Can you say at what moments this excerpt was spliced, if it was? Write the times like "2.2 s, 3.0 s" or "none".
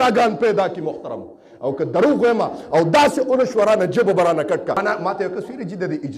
4.8 s